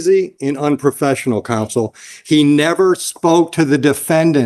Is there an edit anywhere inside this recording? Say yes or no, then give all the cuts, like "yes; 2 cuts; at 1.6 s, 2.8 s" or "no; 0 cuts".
no; 0 cuts